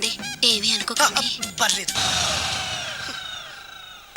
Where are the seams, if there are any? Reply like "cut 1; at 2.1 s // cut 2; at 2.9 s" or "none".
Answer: cut 1; at 2.0 s